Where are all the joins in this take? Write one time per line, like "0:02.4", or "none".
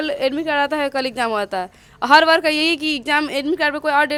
none